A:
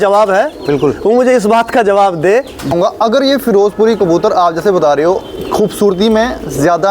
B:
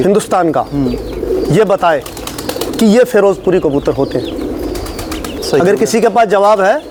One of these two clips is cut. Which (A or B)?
A